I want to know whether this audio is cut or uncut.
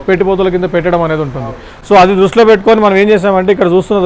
uncut